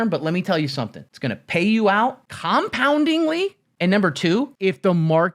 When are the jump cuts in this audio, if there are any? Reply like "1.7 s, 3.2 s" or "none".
1.0 s, 2.3 s, 3.7 s, 4.5 s